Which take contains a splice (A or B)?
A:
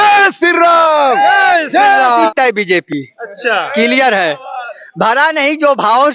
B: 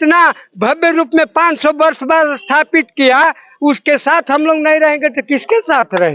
A